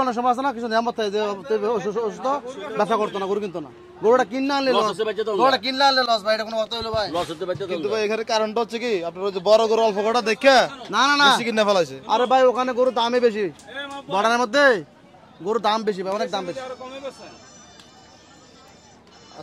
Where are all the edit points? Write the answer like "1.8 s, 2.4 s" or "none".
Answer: none